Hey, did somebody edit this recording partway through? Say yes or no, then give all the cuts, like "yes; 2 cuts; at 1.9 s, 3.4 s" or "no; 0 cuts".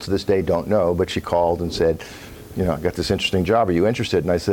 no; 0 cuts